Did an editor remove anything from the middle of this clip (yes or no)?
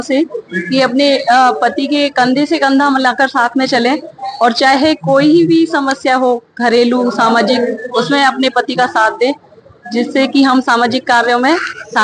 no